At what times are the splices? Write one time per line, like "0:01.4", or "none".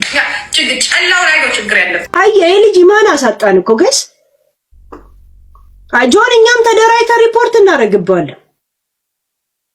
0:02.0

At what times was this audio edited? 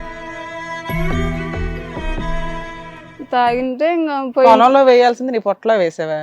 0:03.1

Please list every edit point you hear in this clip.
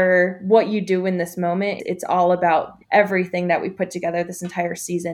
0:01.8
0:02.8

